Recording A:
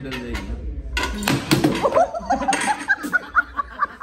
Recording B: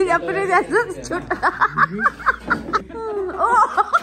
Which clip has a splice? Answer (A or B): B